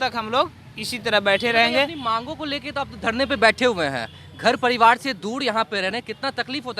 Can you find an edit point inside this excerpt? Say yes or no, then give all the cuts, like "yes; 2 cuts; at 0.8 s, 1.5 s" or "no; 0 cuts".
no; 0 cuts